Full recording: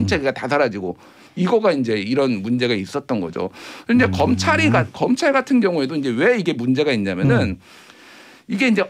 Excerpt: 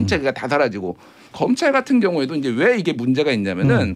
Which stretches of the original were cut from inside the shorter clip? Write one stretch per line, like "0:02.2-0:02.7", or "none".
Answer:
0:01.3-0:04.9